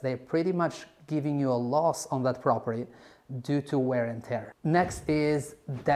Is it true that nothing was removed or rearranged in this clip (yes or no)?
no